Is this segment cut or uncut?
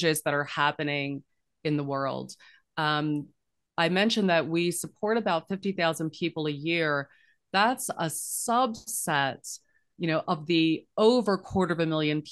uncut